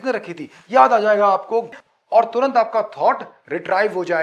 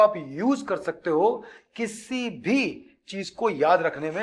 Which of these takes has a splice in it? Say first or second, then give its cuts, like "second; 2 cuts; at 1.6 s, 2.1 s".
first; 1 cut; at 1.7 s